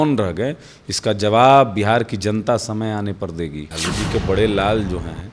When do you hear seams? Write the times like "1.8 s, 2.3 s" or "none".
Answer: 3.7 s